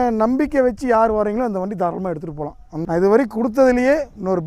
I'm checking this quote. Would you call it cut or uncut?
cut